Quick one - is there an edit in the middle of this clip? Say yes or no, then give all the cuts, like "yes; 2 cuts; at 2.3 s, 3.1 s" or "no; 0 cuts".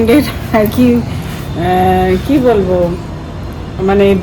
no; 0 cuts